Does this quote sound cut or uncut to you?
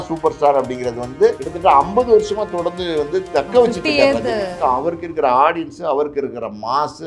cut